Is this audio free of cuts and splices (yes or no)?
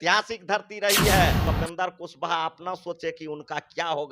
no